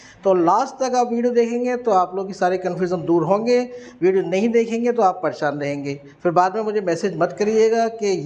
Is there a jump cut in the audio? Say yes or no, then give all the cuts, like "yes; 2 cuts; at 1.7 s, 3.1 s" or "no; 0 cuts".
no; 0 cuts